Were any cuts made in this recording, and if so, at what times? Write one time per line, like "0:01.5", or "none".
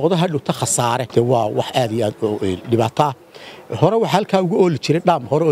0:01.1